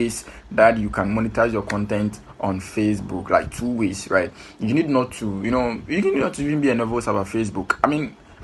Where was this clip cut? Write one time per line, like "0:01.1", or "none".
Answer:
none